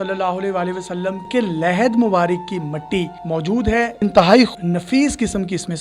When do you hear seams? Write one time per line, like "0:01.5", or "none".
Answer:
0:01.2
0:03.9
0:04.5